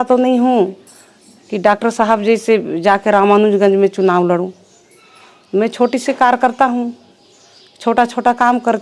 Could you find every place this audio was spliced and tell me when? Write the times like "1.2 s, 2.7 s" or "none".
none